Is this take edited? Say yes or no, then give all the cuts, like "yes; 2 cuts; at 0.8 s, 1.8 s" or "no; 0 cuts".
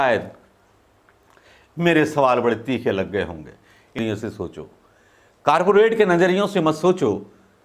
yes; 1 cut; at 3.9 s